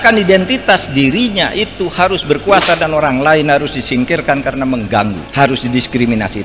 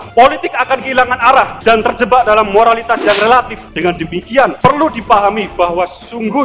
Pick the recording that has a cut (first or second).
first